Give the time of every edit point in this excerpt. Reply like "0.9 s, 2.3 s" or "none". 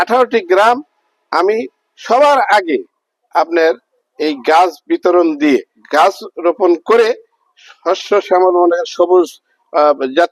5.8 s